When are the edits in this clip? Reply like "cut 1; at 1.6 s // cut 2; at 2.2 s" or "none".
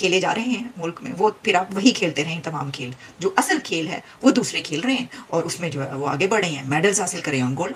none